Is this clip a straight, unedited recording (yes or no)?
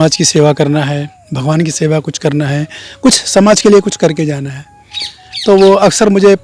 yes